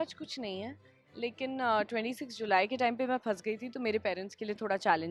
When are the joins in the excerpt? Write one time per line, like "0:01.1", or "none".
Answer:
none